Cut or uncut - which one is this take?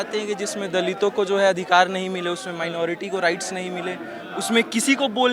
uncut